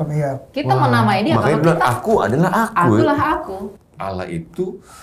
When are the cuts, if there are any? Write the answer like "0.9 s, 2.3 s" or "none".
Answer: 3.8 s